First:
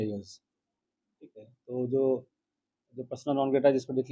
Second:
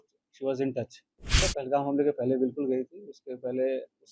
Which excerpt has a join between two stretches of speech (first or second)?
second